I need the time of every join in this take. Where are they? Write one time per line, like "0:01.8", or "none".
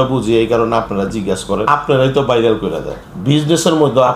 0:01.7
0:03.0

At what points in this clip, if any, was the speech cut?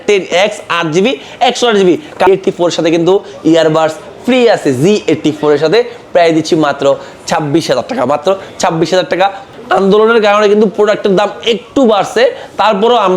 0:02.3
0:09.4

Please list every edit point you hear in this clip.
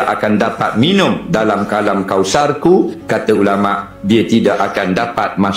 none

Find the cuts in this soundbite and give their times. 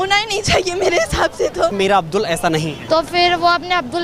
0:01.7
0:02.8

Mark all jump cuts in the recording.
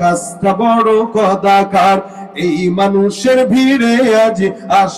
none

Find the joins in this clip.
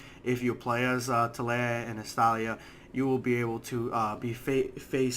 0:04.2

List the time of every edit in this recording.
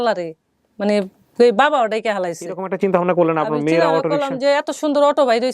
0:02.7

